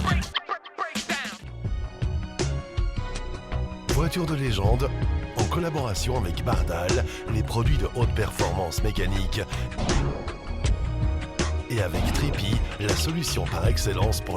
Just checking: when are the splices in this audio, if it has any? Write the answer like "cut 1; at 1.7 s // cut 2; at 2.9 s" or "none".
cut 1; at 1.5 s